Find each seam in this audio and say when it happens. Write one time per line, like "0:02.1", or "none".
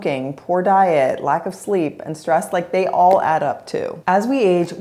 0:03.9